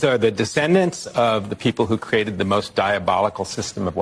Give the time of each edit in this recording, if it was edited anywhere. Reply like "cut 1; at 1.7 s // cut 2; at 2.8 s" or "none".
none